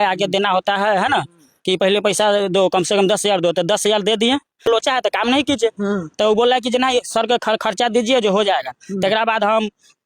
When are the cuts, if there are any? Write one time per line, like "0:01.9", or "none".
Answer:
0:04.7